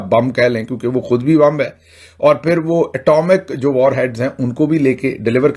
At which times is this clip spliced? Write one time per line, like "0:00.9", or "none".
none